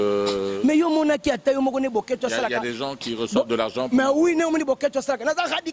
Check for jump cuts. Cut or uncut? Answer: uncut